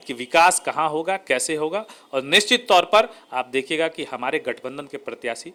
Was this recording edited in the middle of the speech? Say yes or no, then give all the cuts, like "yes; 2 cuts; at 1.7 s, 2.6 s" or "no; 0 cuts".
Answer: no; 0 cuts